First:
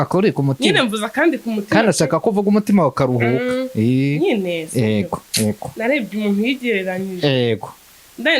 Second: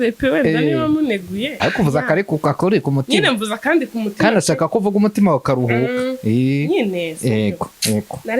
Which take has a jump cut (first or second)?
second